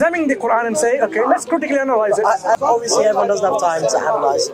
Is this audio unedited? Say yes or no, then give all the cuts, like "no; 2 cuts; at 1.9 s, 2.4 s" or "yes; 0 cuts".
no; 1 cut; at 2.6 s